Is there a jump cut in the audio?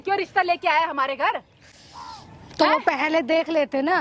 no; 0 cuts

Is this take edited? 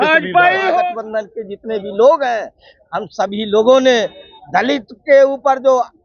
yes; 1 cut; at 1.0 s

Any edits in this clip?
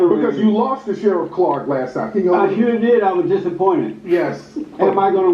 yes; 1 cut; at 4.4 s

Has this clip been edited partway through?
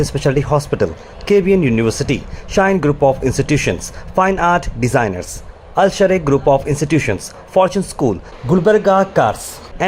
no; 0 cuts

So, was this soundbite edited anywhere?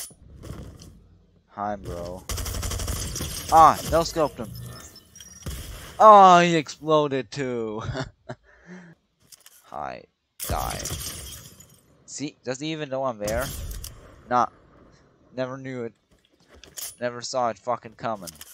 yes; 1 cut; at 9.0 s

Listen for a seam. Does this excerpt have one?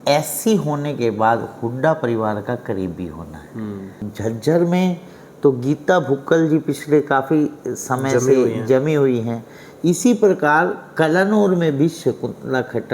yes; 1 cut; at 4.1 s

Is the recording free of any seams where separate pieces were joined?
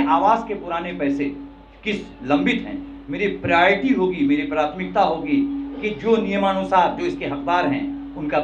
yes; 0 cuts

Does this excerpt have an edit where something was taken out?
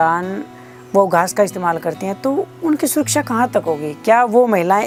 no; 0 cuts

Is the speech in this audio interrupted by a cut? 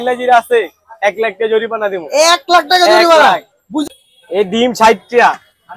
yes; 1 cut; at 3.9 s

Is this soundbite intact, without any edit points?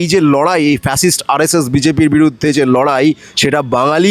yes; 0 cuts

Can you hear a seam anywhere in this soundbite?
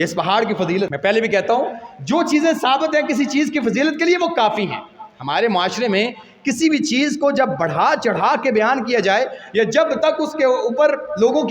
yes; 1 cut; at 0.9 s

